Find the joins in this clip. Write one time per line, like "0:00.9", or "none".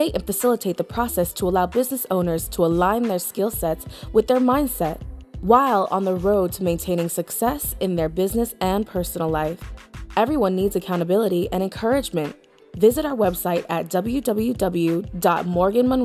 none